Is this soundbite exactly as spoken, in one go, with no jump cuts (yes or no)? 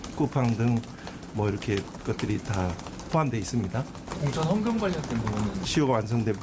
no